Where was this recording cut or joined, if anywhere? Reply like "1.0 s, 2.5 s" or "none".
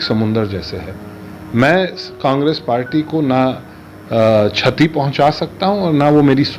none